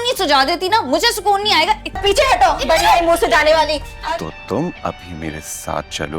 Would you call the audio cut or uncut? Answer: cut